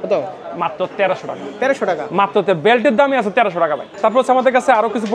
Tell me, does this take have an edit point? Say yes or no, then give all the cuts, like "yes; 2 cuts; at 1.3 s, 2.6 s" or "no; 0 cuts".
no; 0 cuts